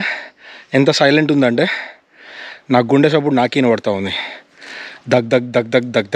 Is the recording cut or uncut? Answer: uncut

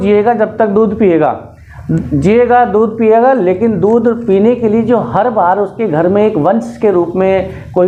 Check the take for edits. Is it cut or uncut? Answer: uncut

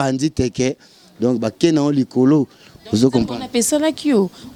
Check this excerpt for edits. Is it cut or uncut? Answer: uncut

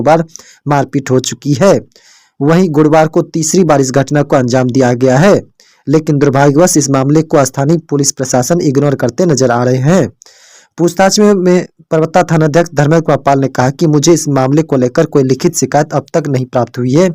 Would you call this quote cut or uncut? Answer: uncut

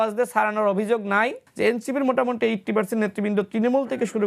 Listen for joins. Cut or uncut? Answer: cut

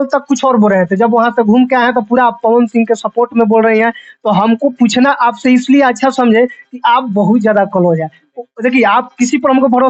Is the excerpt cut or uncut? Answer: uncut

